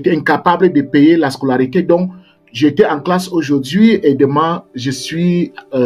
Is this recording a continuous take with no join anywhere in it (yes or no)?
yes